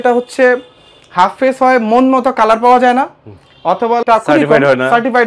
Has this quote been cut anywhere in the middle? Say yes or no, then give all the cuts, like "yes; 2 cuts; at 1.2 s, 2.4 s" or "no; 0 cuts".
yes; 1 cut; at 4.0 s